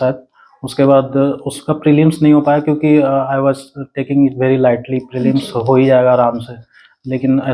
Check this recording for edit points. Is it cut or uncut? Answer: uncut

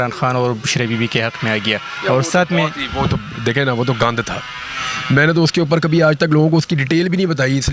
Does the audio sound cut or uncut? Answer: uncut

